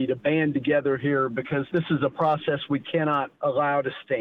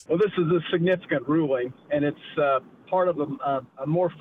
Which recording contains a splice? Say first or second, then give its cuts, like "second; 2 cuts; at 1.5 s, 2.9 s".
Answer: first; 2 cuts; at 1.7 s, 3.3 s